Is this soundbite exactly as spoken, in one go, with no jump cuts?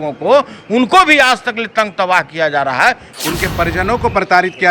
no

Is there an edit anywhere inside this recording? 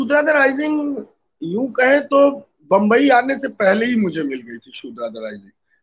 no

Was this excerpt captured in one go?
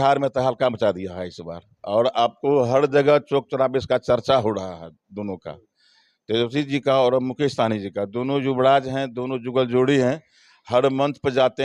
yes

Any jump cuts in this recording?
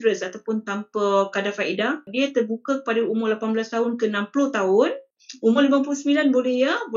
yes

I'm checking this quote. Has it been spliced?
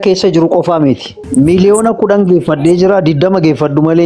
yes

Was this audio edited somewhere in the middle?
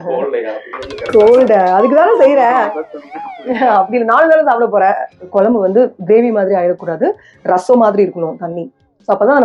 yes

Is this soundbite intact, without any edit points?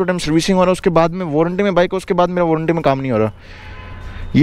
yes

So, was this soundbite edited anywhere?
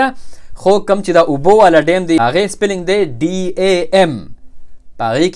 yes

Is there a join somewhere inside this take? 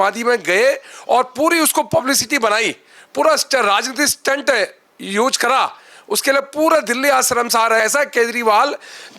yes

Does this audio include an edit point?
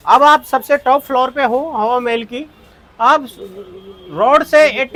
no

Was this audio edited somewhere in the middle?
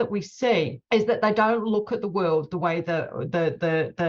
no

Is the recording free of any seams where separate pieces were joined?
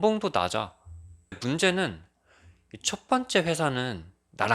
no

